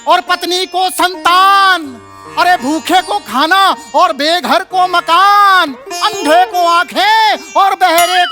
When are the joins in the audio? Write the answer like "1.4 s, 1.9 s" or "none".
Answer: none